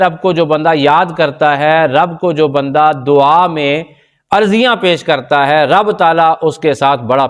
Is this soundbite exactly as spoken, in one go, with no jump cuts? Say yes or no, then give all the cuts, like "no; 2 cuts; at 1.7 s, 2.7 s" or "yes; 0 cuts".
yes; 0 cuts